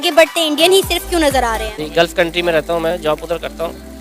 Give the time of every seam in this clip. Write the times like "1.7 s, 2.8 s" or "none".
1.7 s